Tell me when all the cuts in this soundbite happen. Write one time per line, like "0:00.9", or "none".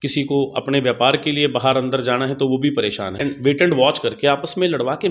0:03.2